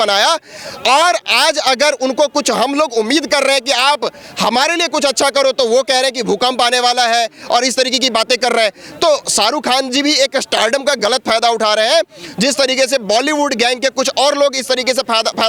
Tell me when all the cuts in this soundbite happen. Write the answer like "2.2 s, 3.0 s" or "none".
none